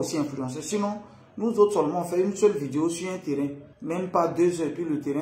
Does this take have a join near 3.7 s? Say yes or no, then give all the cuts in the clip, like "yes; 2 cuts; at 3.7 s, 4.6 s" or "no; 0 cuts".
yes; 1 cut; at 3.7 s